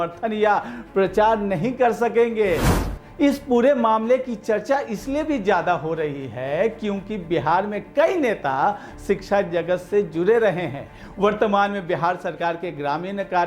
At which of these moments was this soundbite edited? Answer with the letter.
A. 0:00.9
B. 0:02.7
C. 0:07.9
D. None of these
B